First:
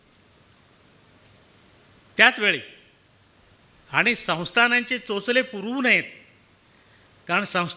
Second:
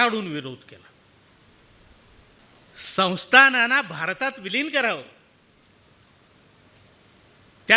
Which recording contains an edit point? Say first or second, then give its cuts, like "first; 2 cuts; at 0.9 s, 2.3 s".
second; 1 cut; at 2.4 s